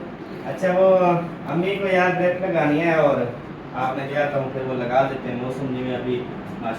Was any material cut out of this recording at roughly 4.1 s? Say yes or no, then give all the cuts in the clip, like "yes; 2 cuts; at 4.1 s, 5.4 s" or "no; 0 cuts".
yes; 1 cut; at 4.1 s